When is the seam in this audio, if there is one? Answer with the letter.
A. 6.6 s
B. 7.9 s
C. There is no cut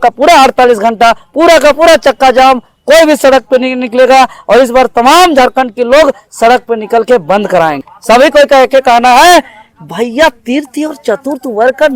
B